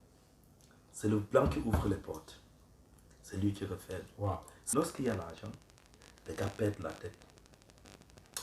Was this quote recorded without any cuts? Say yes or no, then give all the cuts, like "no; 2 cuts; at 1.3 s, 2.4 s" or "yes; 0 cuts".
no; 1 cut; at 4.6 s